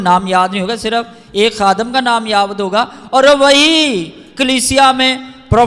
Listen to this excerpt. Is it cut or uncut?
uncut